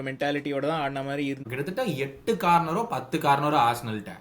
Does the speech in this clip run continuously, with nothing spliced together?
no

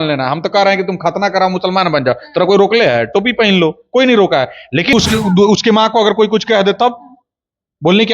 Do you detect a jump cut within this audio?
yes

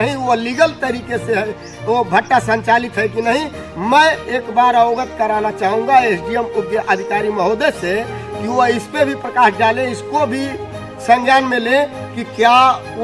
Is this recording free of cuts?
yes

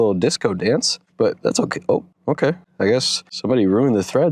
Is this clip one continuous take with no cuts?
yes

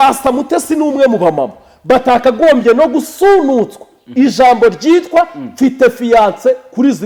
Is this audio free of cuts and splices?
yes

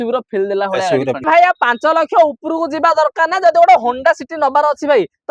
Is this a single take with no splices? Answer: no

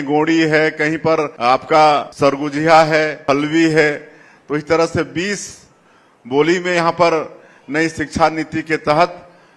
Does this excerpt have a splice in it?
yes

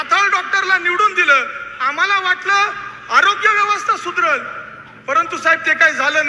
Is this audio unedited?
yes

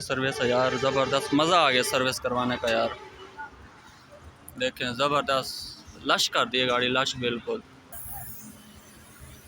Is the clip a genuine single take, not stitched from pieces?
no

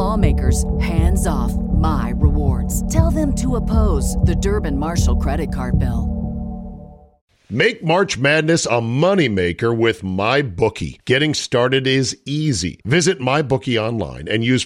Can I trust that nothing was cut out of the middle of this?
no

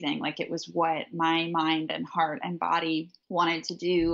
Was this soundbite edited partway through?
yes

